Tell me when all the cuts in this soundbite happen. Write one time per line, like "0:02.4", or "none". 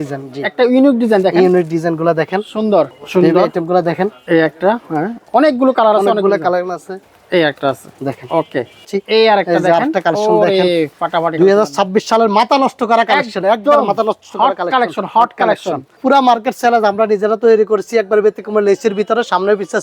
0:02.9
0:06.9
0:08.8
0:16.0